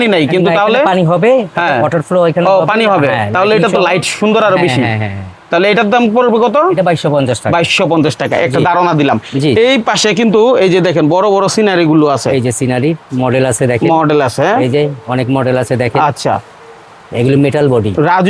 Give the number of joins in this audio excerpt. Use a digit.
0